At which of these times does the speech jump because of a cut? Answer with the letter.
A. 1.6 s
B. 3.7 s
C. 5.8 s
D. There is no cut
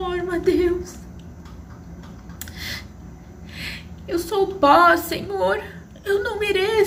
D